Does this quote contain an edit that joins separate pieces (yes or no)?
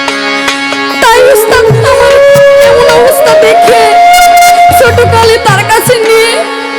no